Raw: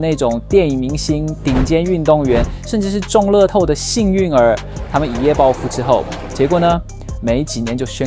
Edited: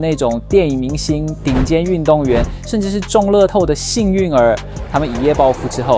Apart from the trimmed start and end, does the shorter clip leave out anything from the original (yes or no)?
no